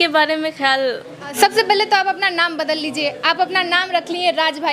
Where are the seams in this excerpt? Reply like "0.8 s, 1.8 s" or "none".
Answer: 1.3 s